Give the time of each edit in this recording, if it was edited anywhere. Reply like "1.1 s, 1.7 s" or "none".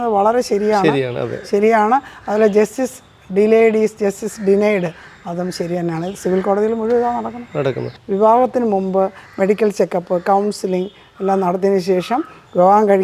7.9 s